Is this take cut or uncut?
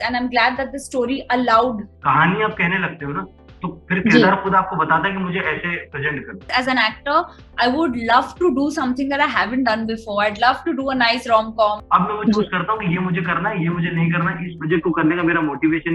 cut